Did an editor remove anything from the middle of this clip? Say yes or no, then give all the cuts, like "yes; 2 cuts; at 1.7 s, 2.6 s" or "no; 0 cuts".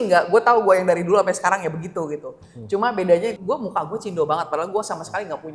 yes; 1 cut; at 3.3 s